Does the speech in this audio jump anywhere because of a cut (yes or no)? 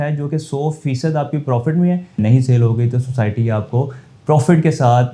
yes